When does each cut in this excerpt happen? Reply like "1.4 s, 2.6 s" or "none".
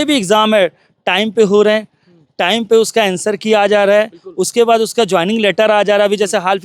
none